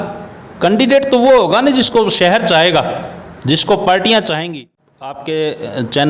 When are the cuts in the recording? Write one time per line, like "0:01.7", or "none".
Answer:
0:04.5